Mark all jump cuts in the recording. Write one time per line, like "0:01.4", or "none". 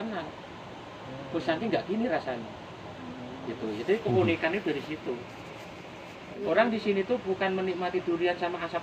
0:06.4